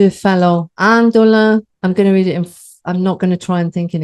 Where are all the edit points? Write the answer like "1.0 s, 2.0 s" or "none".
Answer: none